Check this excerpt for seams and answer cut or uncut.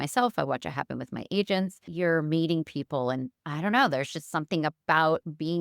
cut